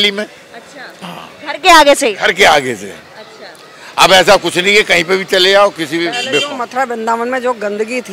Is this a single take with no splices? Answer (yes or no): yes